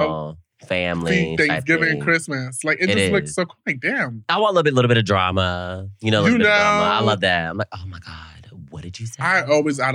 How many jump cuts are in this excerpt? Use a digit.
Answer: 1